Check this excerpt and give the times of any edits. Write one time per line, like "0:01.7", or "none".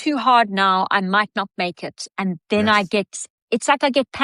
none